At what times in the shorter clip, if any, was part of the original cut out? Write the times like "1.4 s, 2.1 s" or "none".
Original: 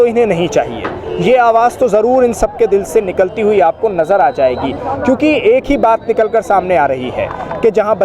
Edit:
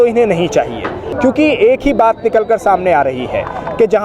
1.0 s